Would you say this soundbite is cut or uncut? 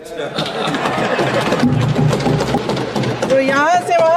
cut